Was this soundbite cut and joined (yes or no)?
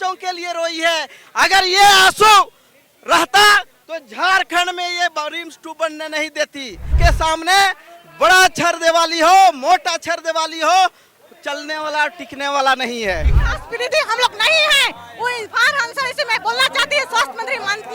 yes